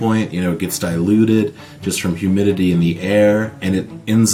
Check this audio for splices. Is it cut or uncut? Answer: uncut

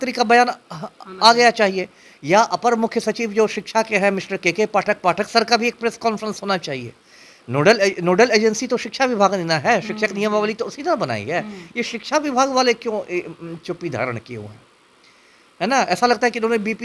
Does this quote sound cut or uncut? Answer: uncut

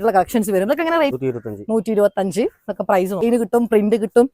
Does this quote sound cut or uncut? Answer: cut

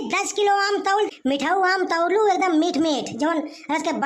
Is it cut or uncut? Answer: cut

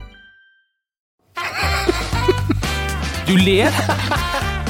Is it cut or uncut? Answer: cut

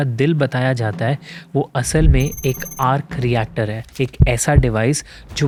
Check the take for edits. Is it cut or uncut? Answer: uncut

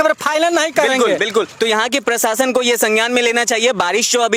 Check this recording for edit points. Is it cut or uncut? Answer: uncut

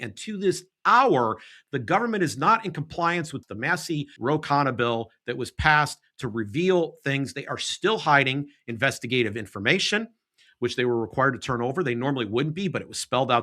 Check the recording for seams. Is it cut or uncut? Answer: cut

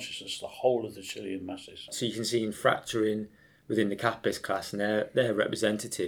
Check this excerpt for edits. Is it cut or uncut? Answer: cut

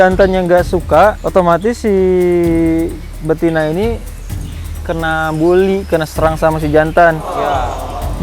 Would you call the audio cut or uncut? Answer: uncut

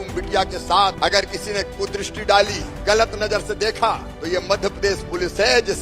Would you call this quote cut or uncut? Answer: cut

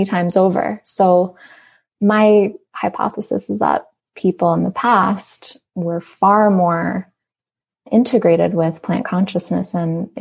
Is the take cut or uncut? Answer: uncut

